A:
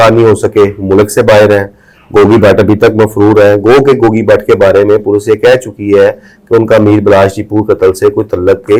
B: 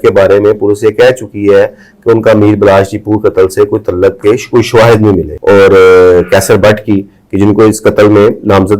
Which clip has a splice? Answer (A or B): B